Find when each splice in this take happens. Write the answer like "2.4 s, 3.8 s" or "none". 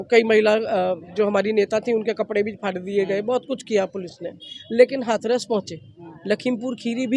none